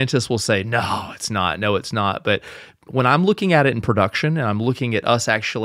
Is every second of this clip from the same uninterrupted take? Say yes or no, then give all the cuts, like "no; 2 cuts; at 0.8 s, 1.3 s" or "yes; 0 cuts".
yes; 0 cuts